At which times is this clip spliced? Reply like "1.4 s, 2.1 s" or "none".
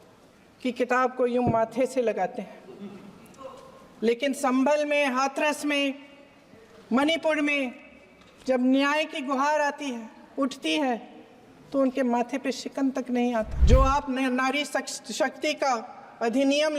13.6 s